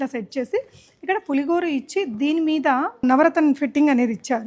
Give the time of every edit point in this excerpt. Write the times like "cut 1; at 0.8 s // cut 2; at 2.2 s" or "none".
cut 1; at 3.0 s